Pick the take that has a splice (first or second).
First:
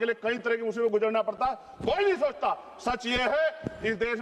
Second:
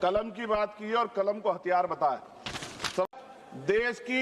second